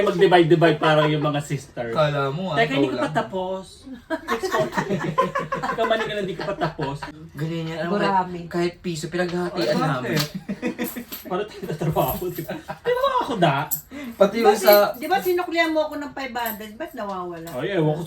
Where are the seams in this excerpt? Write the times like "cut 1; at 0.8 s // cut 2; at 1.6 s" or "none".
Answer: cut 1; at 7.1 s